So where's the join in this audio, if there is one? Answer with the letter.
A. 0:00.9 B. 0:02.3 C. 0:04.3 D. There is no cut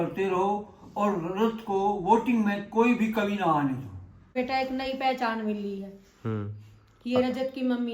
C